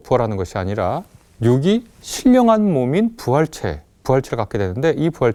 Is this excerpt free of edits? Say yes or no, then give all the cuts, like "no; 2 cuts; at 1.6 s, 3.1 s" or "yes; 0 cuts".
yes; 0 cuts